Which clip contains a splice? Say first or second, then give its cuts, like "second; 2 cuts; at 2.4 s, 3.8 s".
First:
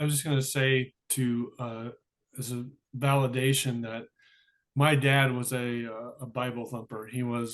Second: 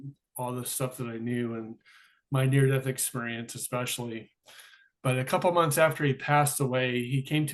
first; 1 cut; at 1.0 s